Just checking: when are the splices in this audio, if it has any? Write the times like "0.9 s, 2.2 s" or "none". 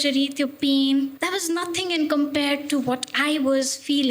1.1 s